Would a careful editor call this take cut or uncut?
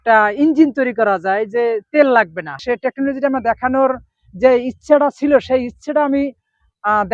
cut